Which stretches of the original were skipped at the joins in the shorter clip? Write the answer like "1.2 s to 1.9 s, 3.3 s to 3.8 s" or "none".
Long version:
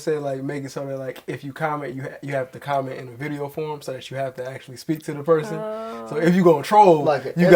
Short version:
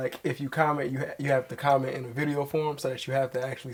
none